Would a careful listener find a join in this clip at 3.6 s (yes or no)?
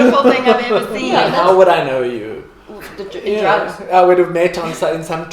no